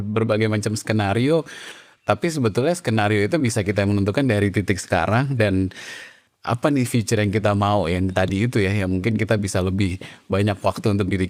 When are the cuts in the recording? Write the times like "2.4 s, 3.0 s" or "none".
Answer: none